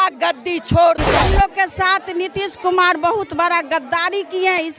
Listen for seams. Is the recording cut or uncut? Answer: cut